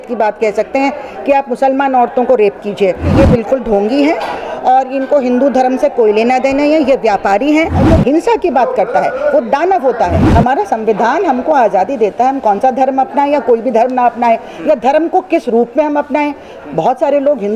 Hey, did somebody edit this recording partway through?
yes; 3 cuts; at 3.1 s, 7.8 s, 10.2 s

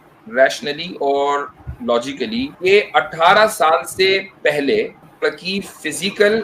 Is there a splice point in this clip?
yes; 2 cuts; at 2.5 s, 5.0 s

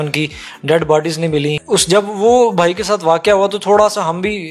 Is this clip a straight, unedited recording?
no; 1 cut; at 1.6 s

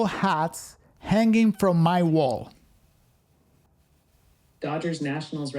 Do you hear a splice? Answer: yes; 1 cut; at 3.7 s

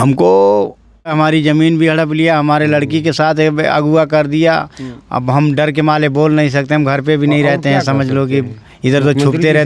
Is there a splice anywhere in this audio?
yes; 1 cut; at 1.1 s

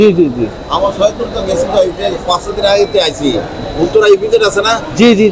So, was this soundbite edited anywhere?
no; 0 cuts

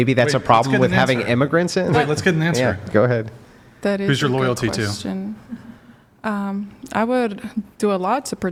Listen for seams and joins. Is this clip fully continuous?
yes; 0 cuts

